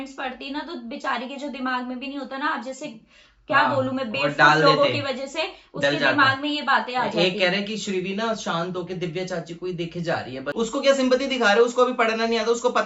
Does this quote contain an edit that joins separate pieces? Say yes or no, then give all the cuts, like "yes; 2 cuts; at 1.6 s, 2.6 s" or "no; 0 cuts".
no; 0 cuts